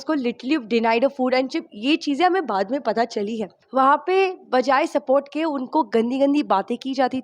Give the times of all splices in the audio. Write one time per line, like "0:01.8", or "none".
0:03.5